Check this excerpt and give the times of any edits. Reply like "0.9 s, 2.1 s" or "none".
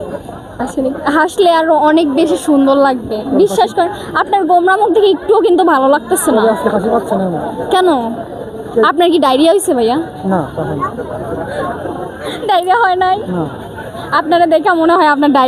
3.4 s, 10.3 s, 12.4 s